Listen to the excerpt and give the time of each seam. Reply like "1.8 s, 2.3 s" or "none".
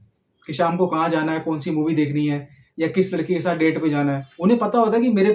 4.3 s